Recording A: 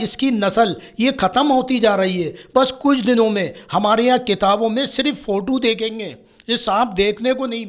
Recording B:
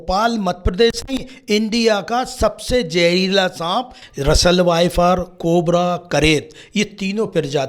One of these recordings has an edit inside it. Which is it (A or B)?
B